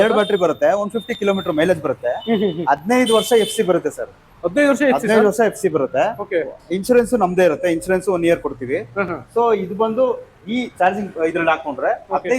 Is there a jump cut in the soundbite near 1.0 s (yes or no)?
no